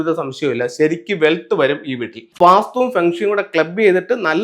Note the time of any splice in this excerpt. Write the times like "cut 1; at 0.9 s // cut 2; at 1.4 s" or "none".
cut 1; at 2.4 s